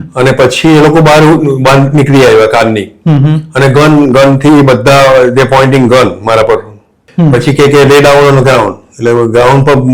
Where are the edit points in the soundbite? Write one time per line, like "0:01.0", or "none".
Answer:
0:07.1